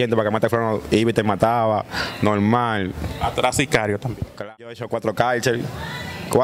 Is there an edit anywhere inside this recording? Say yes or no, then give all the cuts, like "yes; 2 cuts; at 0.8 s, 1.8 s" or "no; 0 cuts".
yes; 1 cut; at 4.5 s